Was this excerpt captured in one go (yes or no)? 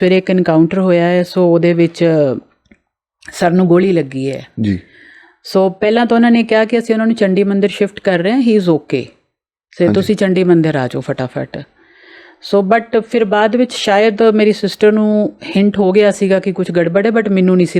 yes